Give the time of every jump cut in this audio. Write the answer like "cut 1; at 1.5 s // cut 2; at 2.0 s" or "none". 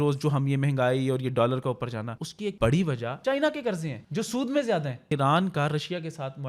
cut 1; at 2.4 s // cut 2; at 3.1 s // cut 3; at 4.0 s // cut 4; at 5.0 s